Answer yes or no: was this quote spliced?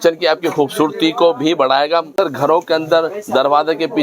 yes